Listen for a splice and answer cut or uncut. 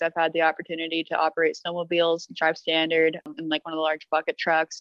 cut